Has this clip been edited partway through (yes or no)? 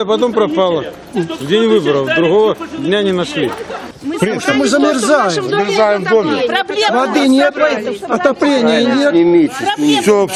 no